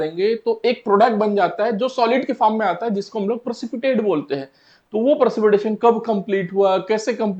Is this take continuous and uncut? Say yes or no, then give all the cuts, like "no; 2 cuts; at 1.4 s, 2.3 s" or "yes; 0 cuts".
yes; 0 cuts